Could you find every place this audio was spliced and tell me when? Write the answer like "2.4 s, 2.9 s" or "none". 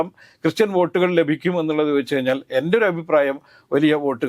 none